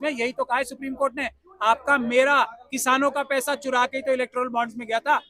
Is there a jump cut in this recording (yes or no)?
no